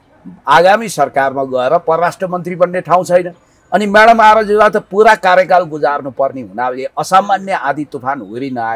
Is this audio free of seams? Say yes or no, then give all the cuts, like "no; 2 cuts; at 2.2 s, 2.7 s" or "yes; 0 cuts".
yes; 0 cuts